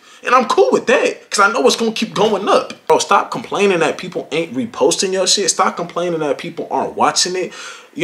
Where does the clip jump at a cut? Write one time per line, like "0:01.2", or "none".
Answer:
0:02.9